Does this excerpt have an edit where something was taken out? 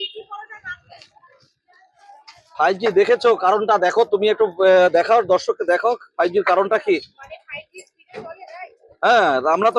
no; 0 cuts

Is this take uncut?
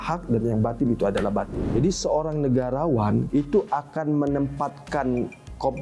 no; 2 cuts; at 1.6 s, 3.3 s

